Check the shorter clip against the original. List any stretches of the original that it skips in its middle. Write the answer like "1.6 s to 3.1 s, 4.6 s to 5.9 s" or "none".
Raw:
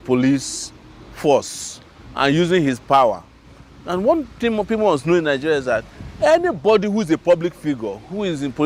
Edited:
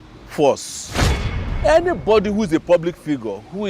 2.1 s to 5.8 s